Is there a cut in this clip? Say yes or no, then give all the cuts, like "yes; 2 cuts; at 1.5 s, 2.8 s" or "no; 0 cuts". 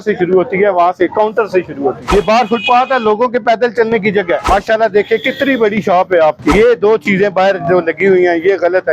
yes; 3 cuts; at 2.0 s, 4.4 s, 6.5 s